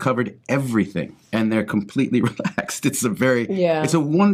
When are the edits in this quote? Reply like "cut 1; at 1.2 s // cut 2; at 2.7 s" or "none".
none